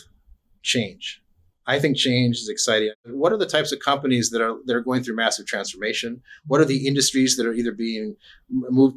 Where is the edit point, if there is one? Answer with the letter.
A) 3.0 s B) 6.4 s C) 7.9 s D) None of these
A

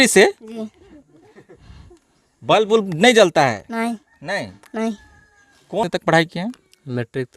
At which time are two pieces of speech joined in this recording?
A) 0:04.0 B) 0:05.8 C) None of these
B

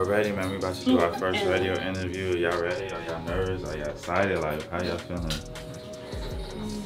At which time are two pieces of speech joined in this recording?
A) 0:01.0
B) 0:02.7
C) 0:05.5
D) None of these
D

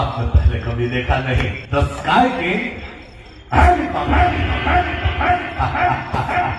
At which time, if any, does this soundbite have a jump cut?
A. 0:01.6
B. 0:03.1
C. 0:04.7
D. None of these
A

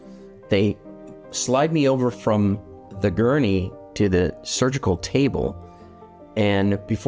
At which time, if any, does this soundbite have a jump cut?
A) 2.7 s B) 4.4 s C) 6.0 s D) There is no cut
D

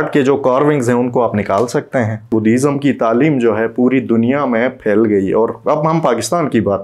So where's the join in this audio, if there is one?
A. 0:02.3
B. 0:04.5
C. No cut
A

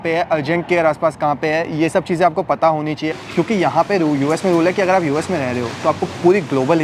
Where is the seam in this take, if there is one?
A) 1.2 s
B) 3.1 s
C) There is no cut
B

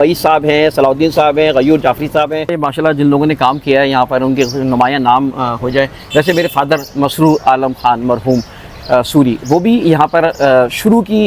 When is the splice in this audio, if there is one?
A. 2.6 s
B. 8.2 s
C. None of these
A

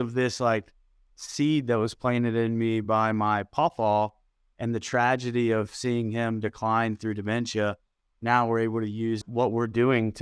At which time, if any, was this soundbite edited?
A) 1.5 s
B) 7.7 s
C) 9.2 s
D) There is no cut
C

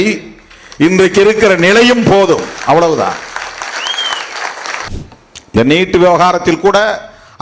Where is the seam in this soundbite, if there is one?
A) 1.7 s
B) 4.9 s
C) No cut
B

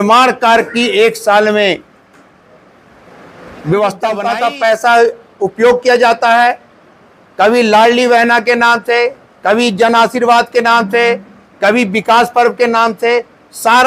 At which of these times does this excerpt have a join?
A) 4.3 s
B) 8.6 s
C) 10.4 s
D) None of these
A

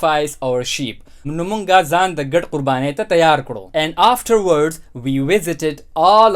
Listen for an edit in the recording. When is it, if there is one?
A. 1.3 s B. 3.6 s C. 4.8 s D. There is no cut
B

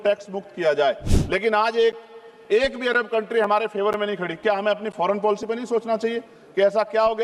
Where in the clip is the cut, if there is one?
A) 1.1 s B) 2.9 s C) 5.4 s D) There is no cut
A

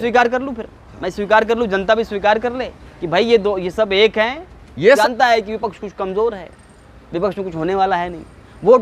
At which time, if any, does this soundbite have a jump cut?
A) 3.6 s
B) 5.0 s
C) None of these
B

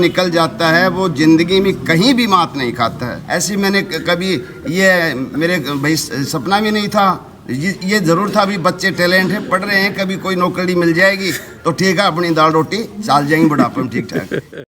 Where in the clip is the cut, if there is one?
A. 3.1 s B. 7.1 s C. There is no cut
A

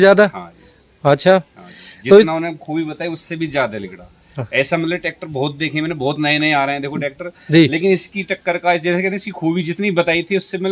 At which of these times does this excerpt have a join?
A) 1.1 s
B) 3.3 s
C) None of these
C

